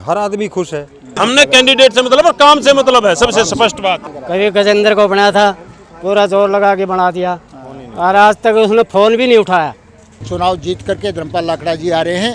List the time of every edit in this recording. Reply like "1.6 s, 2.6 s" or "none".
1.1 s, 4.1 s, 10.2 s

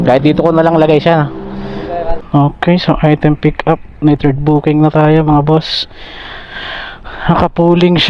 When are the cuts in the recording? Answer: 2.2 s

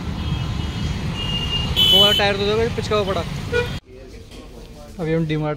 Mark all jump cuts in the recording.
3.9 s

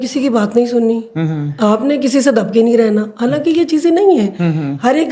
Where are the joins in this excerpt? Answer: none

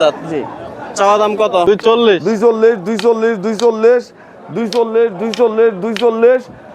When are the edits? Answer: 1.7 s

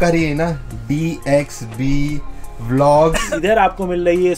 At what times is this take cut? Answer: 3.3 s

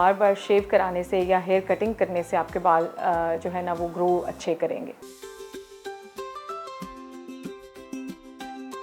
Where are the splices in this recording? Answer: 5.0 s

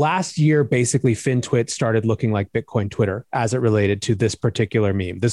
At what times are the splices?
none

